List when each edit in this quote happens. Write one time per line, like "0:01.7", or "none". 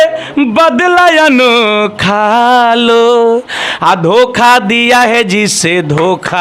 none